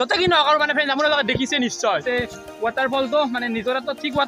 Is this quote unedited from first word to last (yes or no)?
no